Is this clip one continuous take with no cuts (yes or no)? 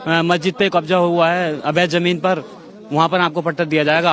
yes